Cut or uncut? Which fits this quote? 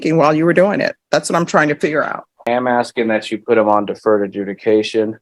cut